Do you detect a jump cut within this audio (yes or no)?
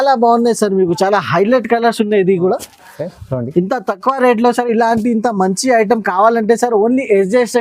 no